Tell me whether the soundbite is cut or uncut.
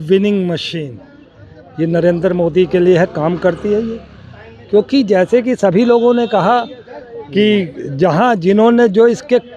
uncut